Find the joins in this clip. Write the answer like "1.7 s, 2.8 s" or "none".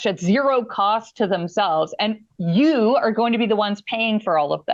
none